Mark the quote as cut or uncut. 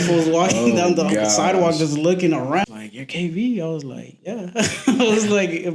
cut